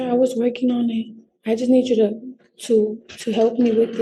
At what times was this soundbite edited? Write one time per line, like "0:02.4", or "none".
none